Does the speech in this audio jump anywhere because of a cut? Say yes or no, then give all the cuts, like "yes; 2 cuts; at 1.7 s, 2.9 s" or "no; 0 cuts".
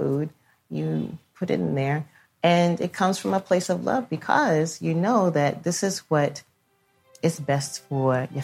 yes; 1 cut; at 7.1 s